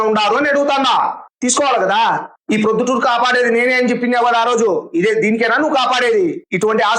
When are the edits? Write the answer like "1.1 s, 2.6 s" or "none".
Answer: none

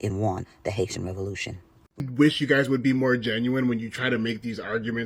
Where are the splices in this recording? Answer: 2.1 s

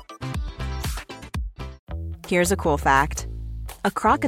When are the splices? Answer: 1.8 s

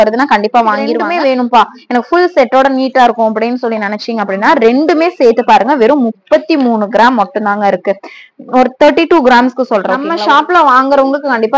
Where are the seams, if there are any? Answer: 1.0 s, 10.0 s

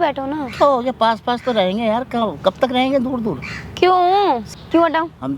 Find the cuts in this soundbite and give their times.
4.4 s

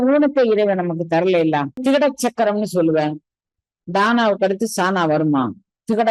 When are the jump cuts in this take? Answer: 1.8 s

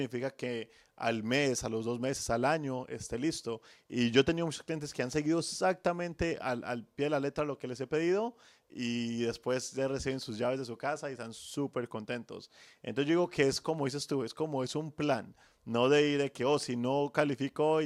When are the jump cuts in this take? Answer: none

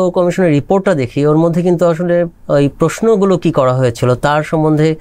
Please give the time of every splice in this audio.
none

